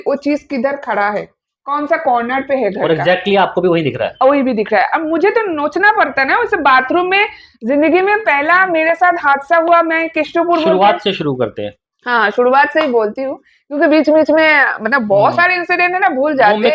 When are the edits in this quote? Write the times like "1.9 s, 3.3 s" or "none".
none